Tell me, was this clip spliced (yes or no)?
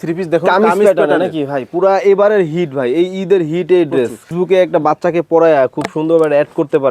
yes